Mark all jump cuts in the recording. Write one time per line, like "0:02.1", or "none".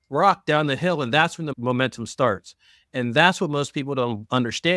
0:01.5